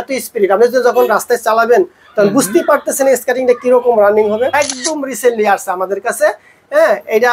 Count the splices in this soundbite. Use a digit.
1